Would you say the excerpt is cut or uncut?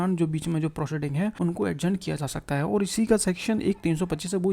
cut